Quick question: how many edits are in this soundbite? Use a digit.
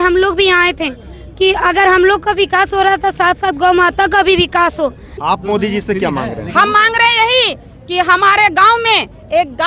1